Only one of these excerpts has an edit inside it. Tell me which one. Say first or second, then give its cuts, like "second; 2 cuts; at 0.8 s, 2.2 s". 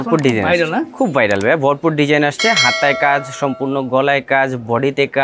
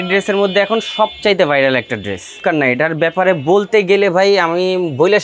second; 1 cut; at 2.4 s